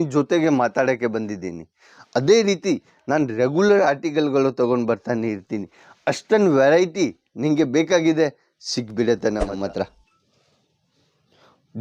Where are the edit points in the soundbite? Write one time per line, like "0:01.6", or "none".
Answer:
0:09.5